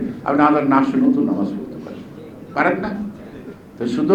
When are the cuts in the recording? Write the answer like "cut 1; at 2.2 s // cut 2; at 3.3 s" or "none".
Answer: none